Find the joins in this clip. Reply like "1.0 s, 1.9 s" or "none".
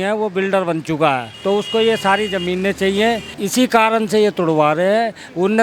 1.3 s, 3.3 s

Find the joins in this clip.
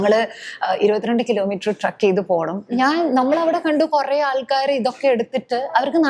2.7 s

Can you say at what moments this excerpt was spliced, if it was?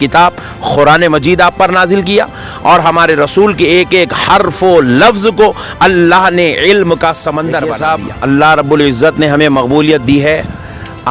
7.7 s

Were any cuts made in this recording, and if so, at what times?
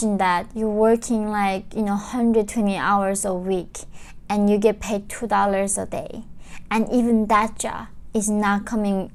none

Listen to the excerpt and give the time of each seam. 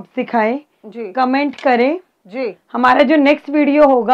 none

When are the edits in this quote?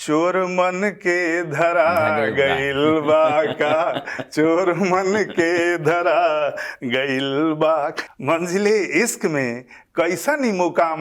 8.0 s

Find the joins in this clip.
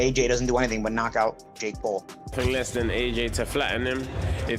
2.3 s

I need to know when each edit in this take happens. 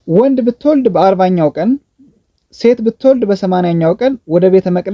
none

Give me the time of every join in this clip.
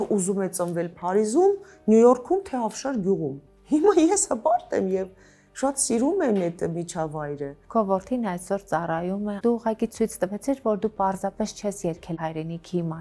3.5 s, 7.5 s, 9.4 s, 12.1 s

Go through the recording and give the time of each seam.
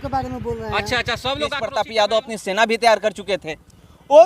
1.6 s

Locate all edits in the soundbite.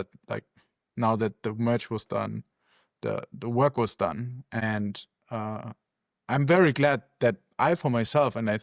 4.6 s

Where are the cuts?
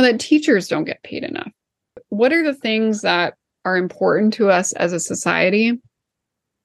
2.0 s

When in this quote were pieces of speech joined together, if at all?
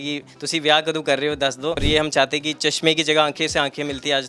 1.8 s

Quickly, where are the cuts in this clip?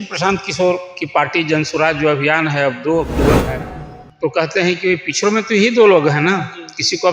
3.5 s

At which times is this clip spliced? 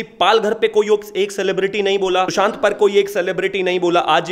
none

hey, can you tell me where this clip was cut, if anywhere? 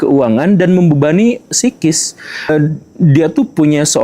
2.5 s

